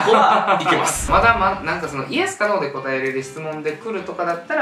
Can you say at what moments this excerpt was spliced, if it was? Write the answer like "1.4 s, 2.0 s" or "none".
1.0 s